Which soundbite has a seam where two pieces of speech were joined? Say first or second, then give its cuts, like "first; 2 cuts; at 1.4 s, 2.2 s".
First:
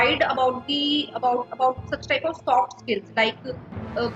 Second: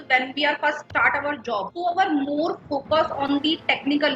second; 2 cuts; at 0.8 s, 1.7 s